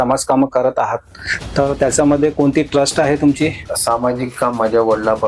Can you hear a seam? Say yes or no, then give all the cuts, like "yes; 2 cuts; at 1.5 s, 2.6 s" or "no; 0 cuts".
yes; 1 cut; at 3.7 s